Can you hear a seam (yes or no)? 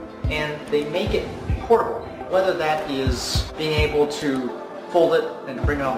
no